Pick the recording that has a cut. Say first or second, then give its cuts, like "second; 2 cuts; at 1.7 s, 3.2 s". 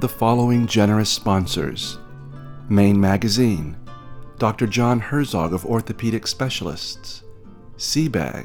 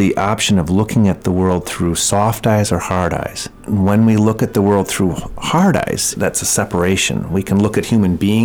second; 2 cuts; at 3.6 s, 6.1 s